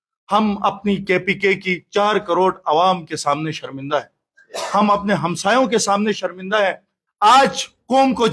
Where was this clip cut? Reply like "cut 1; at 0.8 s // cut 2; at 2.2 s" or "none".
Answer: cut 1; at 7.0 s